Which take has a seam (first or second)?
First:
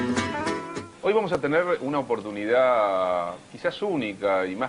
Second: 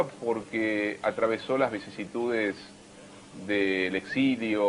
first